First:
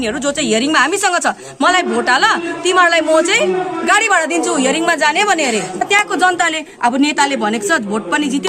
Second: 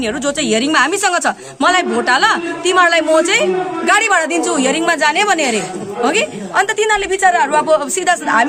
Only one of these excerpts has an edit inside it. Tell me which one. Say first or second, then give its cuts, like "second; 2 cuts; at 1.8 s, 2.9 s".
first; 1 cut; at 5.9 s